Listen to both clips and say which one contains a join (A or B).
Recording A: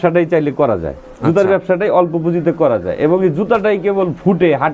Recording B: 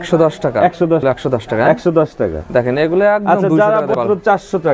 B